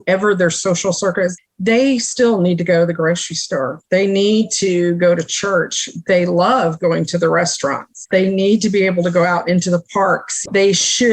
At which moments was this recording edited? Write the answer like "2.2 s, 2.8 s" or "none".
1.5 s, 7.9 s